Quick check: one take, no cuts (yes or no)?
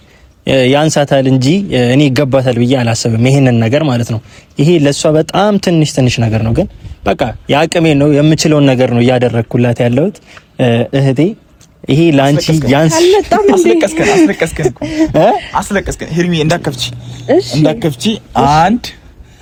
yes